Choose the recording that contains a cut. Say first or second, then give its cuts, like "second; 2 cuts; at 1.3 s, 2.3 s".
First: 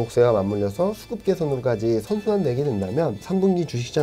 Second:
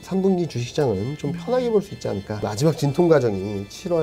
second; 1 cut; at 2.5 s